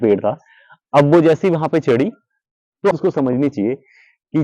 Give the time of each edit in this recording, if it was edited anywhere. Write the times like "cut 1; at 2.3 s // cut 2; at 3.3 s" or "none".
cut 1; at 2.9 s